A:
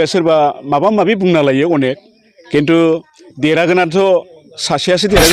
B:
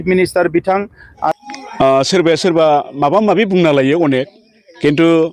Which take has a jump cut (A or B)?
B